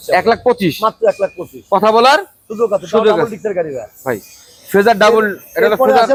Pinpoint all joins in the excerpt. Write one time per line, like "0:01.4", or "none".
none